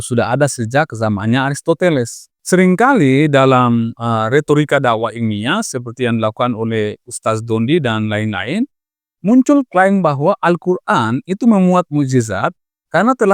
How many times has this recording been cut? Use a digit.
1